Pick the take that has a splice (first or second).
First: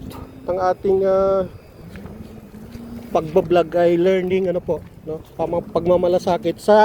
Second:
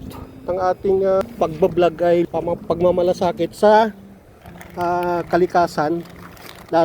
second